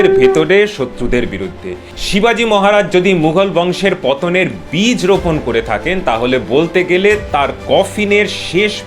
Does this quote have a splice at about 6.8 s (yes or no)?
no